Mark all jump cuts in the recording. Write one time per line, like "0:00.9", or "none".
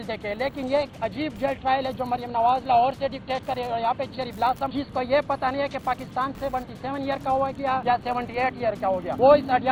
none

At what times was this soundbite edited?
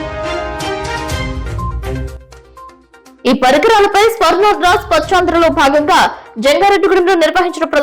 0:01.7

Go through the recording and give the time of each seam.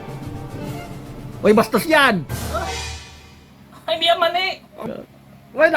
0:04.8

